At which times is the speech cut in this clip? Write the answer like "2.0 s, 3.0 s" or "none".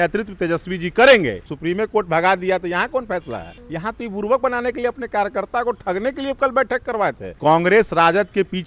1.5 s, 3.6 s, 7.3 s